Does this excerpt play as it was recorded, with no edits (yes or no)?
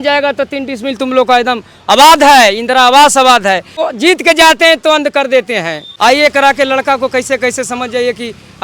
no